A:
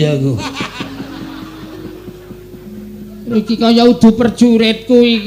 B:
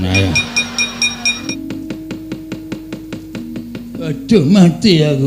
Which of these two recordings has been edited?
B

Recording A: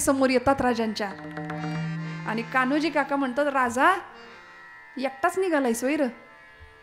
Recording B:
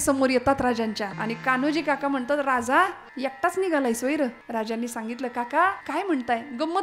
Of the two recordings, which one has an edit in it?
B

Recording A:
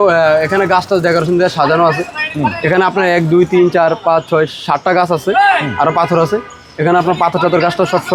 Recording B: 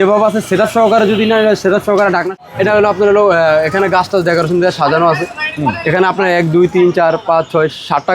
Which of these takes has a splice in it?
B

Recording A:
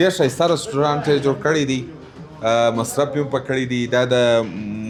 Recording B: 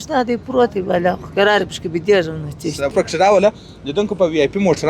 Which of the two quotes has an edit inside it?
B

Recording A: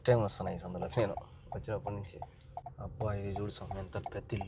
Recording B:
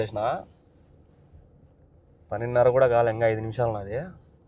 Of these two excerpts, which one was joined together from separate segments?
A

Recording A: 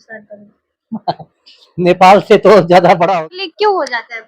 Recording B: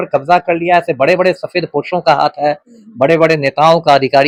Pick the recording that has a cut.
A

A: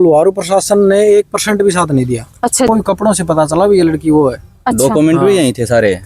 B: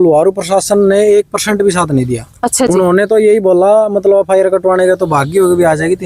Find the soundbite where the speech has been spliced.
A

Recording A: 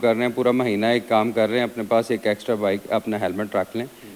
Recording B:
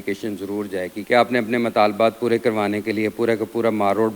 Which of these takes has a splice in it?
B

